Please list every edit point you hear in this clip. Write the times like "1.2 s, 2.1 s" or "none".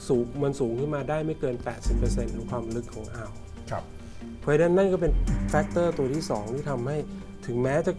none